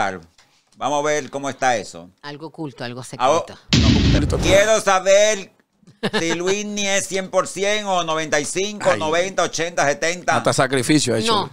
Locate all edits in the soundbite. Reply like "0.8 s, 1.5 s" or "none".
4.2 s